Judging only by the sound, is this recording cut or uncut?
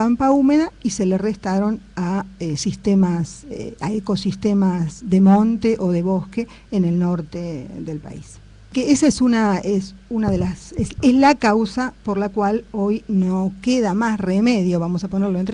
uncut